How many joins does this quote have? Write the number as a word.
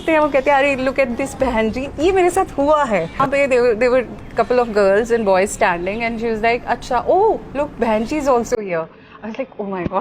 one